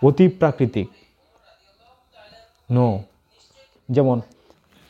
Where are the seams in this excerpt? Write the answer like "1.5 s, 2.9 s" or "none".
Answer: 3.8 s